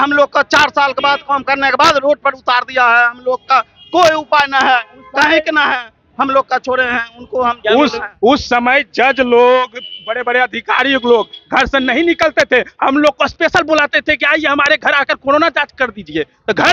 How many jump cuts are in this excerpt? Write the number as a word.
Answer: zero